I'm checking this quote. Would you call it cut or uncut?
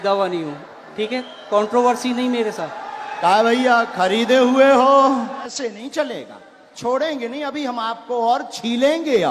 cut